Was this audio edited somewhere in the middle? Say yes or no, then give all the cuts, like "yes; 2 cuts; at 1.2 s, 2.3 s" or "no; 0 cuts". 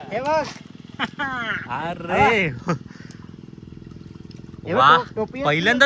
no; 0 cuts